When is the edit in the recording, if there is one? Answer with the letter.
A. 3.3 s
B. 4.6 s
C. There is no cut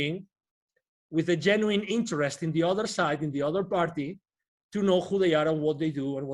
C